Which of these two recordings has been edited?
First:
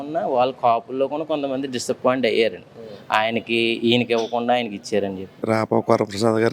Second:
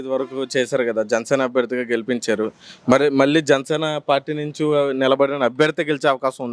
first; 1 cut; at 5.4 s

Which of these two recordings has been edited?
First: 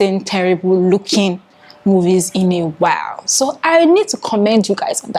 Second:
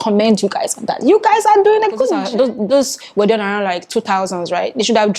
second; 1 cut; at 2.2 s

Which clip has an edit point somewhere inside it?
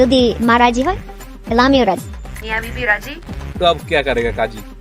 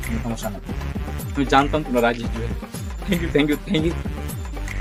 first; 1 cut; at 2.4 s

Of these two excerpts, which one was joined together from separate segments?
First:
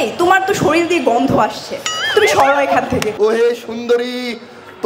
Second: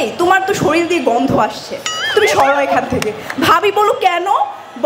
first; 1 cut; at 3.1 s

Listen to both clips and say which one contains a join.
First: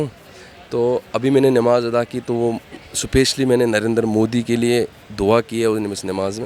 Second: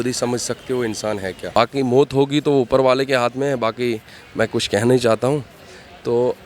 second; 1 cut; at 1.4 s

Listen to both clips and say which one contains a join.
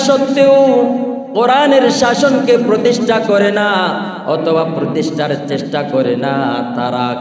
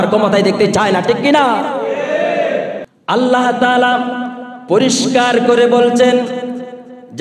second; 1 cut; at 2.9 s

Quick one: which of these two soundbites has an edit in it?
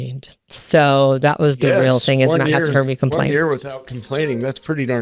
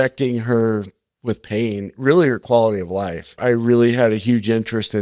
second; 1 cut; at 3.4 s

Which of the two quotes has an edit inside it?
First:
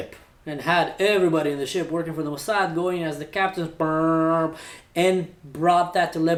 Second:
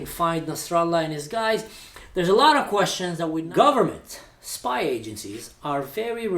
second; 1 cut; at 3.4 s

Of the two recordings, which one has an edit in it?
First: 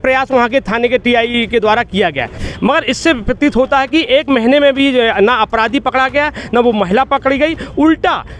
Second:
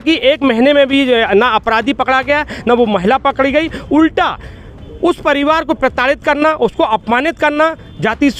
first; 1 cut; at 2.4 s

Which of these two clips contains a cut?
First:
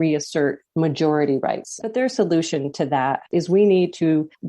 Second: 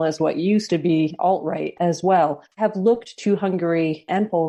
first; 2 cuts; at 1.8 s, 3.2 s

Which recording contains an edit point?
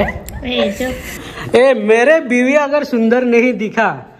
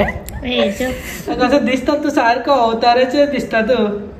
first; 1 cut; at 1.1 s

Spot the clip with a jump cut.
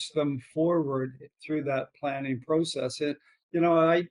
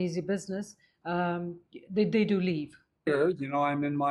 second; 1 cut; at 3.1 s

